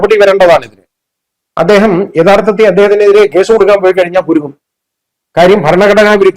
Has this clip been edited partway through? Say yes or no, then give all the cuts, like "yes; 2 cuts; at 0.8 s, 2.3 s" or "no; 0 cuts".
no; 0 cuts